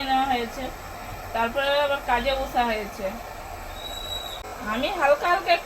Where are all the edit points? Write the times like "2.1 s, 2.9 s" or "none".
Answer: 4.5 s